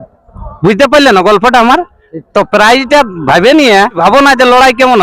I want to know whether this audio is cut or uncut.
cut